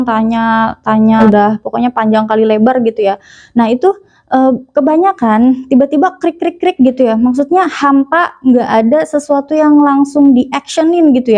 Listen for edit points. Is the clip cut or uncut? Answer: cut